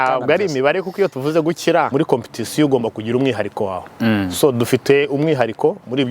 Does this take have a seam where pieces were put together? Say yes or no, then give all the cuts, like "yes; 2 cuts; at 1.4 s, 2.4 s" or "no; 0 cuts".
yes; 1 cut; at 1.9 s